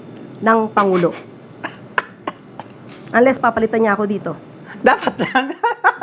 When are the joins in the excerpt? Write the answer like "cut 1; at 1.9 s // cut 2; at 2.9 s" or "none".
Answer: none